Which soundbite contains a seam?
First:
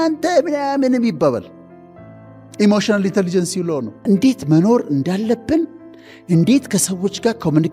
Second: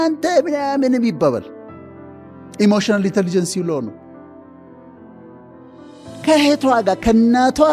first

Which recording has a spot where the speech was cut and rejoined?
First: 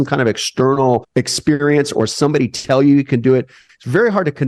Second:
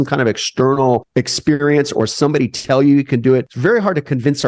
second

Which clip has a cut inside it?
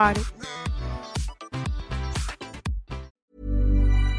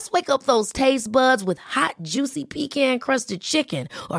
first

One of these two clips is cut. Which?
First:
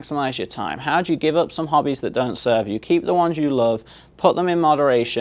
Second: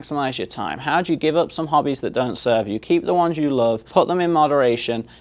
second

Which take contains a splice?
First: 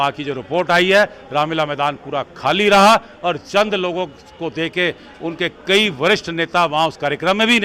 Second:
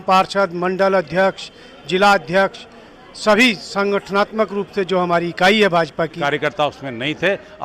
second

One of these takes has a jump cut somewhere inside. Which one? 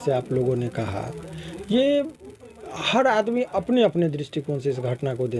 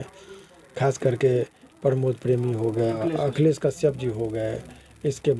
second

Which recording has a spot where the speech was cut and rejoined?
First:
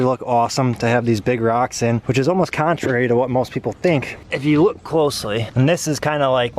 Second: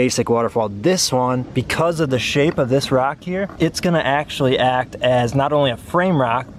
first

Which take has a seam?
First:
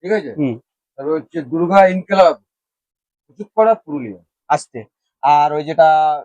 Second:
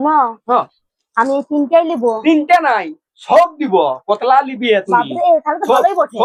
first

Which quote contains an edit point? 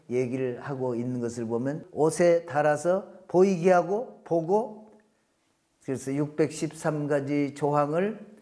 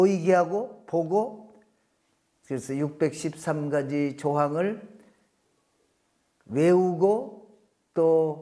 first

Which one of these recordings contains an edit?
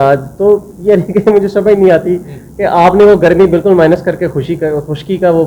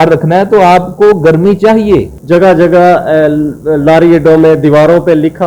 second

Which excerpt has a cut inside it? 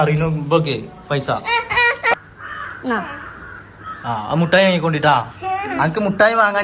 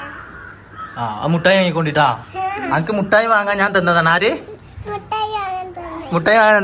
first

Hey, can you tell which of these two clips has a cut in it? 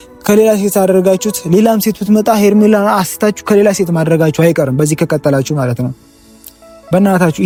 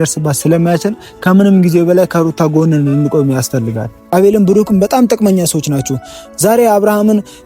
second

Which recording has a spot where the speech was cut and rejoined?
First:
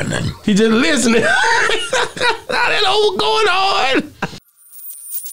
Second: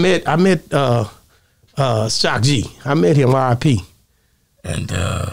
first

